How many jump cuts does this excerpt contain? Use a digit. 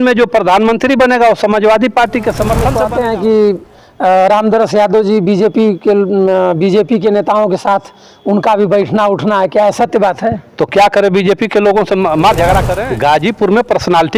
2